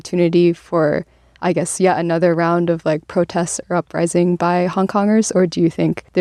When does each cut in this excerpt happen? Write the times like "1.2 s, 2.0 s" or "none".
none